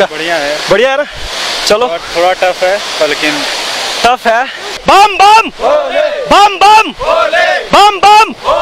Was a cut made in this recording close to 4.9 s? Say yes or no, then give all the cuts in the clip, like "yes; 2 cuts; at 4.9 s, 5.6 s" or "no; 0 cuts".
yes; 1 cut; at 4.9 s